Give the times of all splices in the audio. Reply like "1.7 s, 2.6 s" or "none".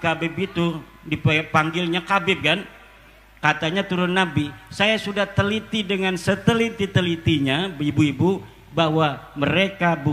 none